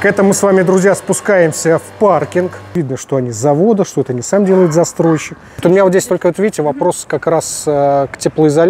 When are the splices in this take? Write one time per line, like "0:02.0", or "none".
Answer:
0:02.7
0:05.6